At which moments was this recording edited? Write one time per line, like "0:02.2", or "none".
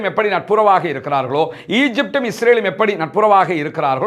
none